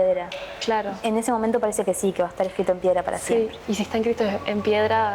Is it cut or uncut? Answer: cut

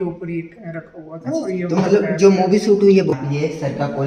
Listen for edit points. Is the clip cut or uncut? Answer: cut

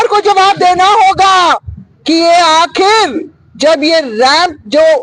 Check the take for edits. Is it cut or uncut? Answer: uncut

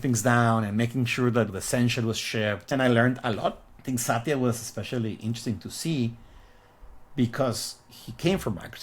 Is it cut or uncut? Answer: cut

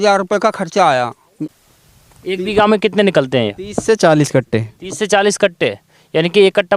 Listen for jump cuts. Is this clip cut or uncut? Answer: cut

